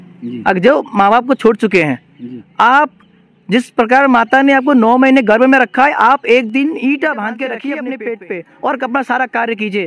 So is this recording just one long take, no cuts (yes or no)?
no